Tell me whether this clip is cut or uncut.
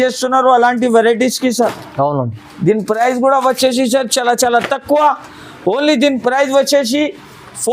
uncut